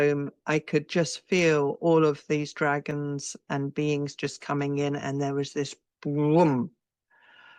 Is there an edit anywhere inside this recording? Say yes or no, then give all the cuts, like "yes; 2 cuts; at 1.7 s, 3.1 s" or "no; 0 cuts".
no; 0 cuts